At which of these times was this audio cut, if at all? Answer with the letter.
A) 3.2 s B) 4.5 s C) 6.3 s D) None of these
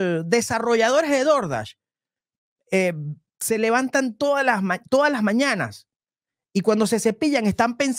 D